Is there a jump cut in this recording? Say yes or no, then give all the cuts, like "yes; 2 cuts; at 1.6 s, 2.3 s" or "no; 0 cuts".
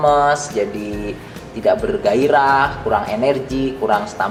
no; 0 cuts